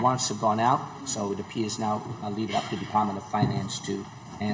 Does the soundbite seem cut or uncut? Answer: uncut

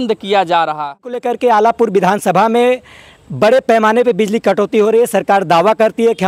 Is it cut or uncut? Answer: cut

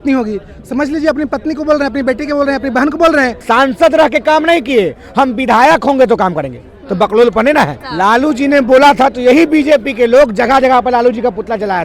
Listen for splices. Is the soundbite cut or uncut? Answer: cut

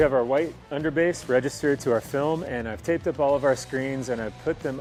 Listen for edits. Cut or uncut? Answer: uncut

